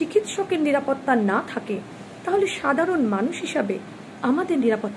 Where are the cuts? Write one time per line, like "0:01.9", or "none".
none